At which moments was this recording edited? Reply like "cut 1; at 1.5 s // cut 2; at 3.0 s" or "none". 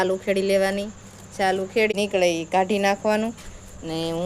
cut 1; at 1.9 s

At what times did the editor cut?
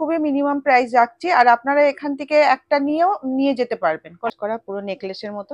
cut 1; at 4.3 s

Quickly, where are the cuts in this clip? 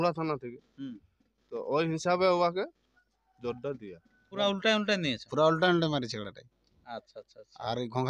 cut 1; at 4.3 s

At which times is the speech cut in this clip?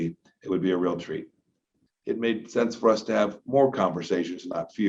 cut 1; at 1.8 s

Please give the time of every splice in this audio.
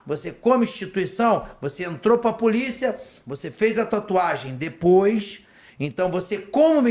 none

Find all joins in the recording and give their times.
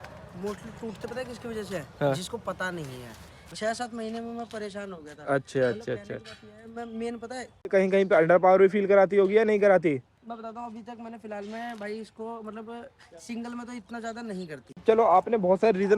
cut 1; at 3.5 s // cut 2; at 7.7 s // cut 3; at 14.6 s

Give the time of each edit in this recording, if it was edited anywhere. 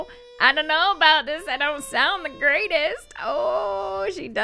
none

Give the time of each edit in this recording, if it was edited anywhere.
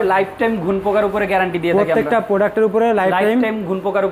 none

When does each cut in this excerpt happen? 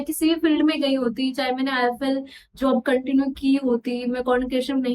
none

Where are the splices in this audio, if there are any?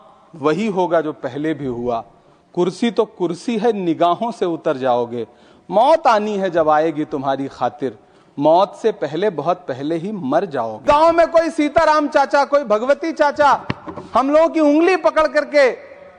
cut 1; at 10.8 s

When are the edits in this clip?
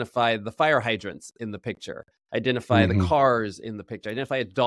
none

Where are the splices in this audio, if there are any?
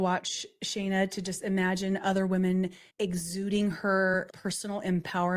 cut 1; at 2.8 s // cut 2; at 4.3 s

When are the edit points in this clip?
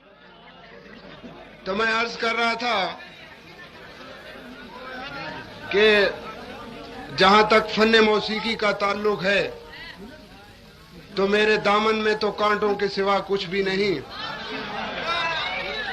cut 1; at 0.9 s

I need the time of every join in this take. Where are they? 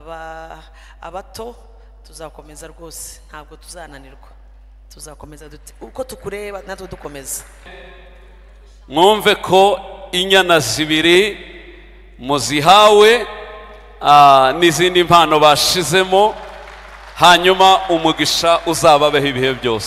cut 1; at 7.7 s

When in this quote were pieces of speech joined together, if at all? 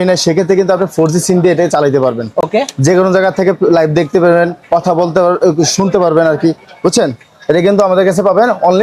none

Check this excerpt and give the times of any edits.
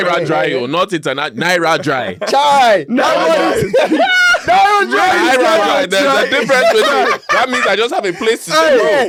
none

